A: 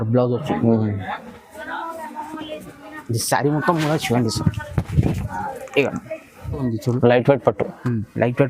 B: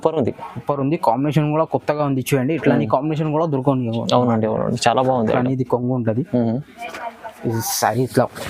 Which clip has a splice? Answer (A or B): A